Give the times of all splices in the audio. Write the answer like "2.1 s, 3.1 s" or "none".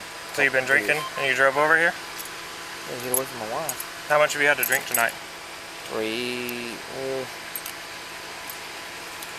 4.0 s